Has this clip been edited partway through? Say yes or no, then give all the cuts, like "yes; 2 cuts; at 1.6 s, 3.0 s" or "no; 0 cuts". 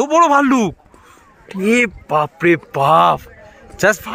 no; 0 cuts